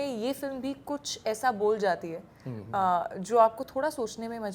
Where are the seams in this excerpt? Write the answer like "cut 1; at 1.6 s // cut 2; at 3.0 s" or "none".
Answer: none

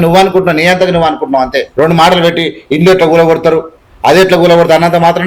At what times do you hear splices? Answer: none

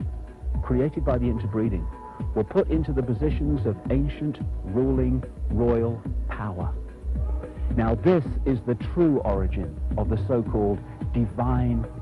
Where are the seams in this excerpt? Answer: none

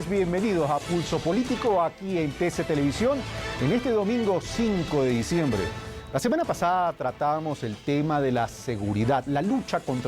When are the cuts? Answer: cut 1; at 4.7 s

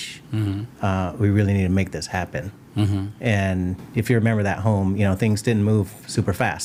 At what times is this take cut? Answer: none

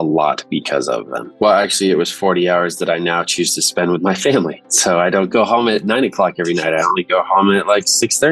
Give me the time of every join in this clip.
cut 1; at 1.2 s // cut 2; at 5.3 s

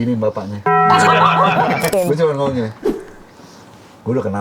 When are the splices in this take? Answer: cut 1; at 1.9 s

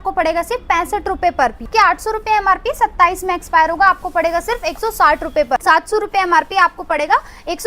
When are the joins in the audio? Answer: cut 1; at 1.7 s // cut 2; at 5.6 s

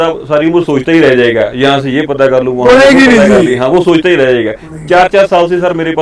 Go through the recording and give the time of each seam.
none

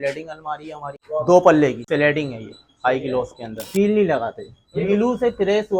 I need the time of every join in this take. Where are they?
cut 1; at 0.9 s // cut 2; at 1.8 s // cut 3; at 3.6 s // cut 4; at 4.8 s

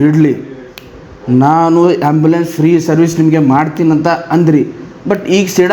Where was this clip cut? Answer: none

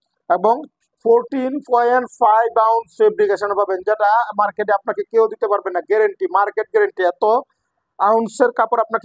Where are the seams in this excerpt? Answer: none

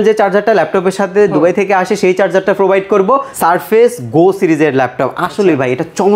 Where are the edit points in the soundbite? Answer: cut 1; at 3.3 s

